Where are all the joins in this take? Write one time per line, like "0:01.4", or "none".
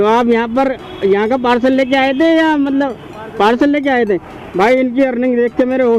none